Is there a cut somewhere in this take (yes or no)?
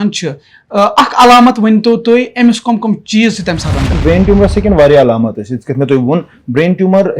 yes